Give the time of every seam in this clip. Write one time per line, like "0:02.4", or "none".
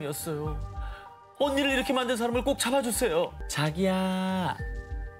0:03.4